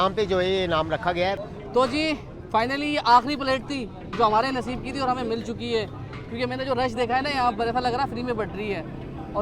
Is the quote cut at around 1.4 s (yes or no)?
yes